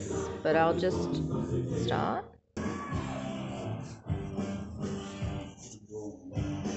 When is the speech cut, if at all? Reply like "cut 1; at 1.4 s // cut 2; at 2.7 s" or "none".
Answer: cut 1; at 2.6 s